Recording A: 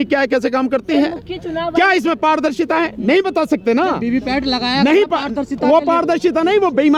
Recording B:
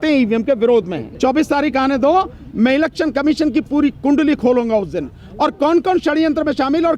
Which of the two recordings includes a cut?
B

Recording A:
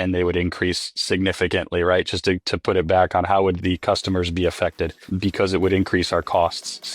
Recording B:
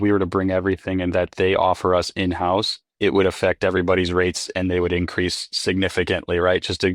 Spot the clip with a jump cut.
A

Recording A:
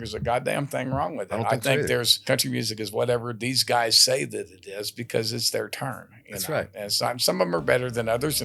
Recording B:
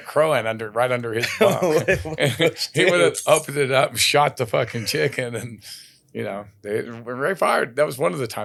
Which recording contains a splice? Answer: A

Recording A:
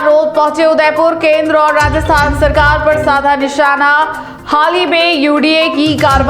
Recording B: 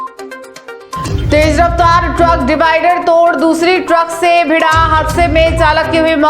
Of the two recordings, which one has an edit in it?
B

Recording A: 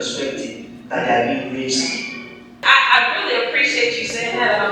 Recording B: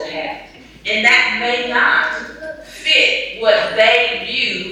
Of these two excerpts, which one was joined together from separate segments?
A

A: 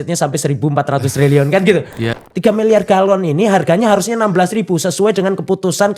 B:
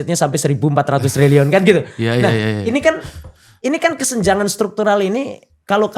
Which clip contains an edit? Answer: A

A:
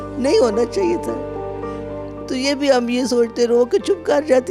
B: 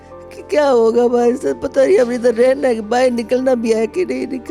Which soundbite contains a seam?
A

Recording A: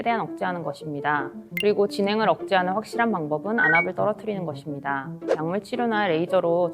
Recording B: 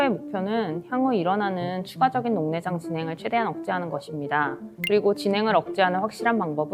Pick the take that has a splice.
A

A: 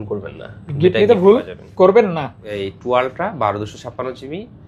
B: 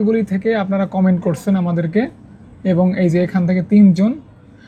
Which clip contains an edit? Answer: A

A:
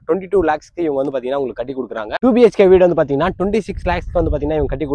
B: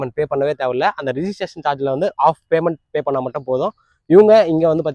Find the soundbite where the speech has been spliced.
A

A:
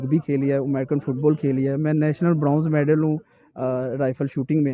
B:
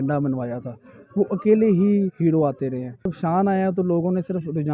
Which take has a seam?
B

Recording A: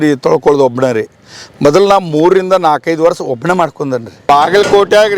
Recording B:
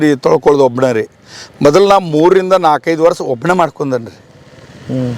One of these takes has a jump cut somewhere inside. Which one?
A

